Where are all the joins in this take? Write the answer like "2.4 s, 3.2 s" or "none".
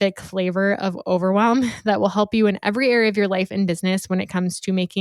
none